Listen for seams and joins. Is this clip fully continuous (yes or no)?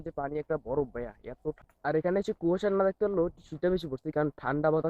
no